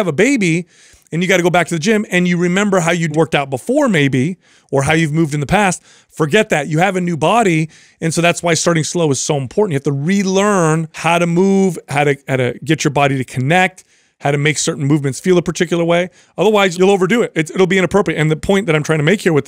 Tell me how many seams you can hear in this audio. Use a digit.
3